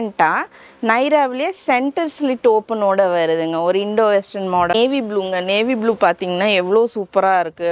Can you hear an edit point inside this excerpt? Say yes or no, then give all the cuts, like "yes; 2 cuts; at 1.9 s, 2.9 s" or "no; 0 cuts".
yes; 1 cut; at 4.7 s